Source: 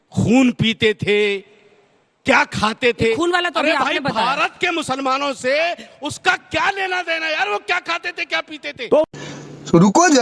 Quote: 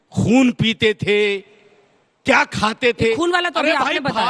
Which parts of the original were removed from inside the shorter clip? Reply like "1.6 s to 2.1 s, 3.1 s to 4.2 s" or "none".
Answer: none